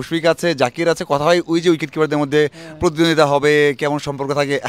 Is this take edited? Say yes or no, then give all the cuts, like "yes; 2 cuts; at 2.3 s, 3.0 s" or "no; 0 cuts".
no; 0 cuts